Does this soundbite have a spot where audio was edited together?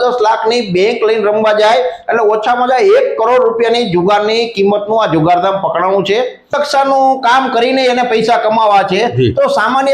yes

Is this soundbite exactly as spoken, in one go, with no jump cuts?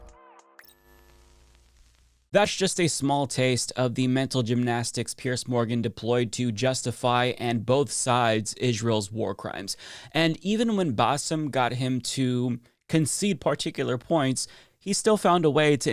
yes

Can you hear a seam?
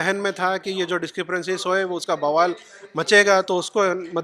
no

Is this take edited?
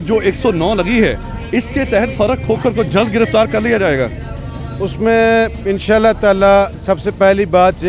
no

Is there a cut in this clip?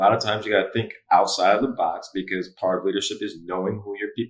no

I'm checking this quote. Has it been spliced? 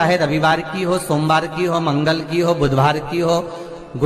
no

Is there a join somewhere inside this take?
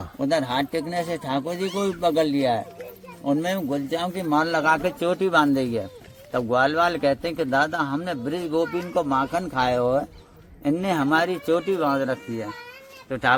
no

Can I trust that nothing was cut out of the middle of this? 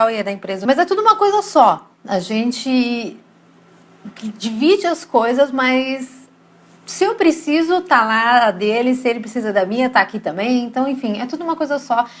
yes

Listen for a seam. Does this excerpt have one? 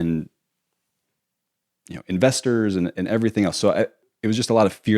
yes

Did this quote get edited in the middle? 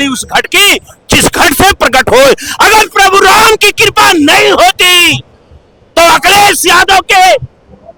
no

